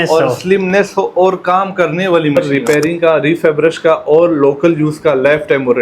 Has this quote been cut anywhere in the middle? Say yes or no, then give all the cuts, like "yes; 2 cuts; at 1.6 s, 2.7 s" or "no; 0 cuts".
yes; 1 cut; at 2.4 s